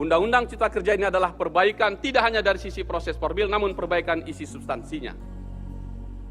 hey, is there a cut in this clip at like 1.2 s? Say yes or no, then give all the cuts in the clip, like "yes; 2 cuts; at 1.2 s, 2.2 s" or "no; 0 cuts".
no; 1 cut; at 5.3 s